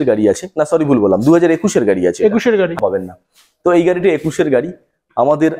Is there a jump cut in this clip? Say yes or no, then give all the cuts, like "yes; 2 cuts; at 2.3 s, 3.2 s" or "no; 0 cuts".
yes; 1 cut; at 2.8 s